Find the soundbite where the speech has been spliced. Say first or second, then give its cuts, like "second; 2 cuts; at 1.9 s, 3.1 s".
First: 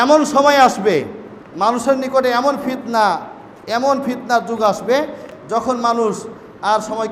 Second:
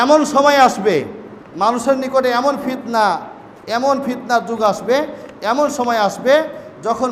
first; 1 cut; at 5.3 s